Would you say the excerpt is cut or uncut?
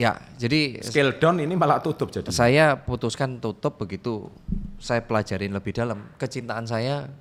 uncut